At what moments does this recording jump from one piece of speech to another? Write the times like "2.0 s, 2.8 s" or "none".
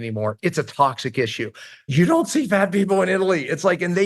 1.9 s